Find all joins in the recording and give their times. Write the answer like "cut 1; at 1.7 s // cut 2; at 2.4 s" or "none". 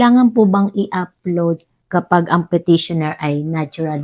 none